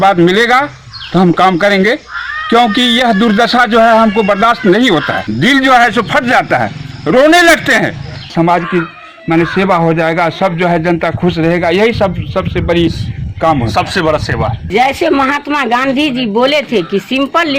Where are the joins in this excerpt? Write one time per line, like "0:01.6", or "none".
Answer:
0:05.2
0:08.3
0:14.7